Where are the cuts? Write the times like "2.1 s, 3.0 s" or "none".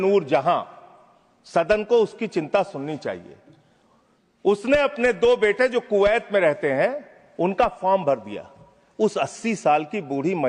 none